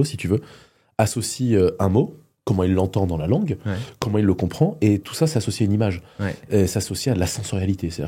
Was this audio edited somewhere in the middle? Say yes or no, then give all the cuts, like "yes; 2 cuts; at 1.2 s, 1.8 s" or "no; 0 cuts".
no; 0 cuts